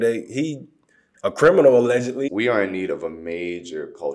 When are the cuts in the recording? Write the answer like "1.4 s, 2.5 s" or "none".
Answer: 2.2 s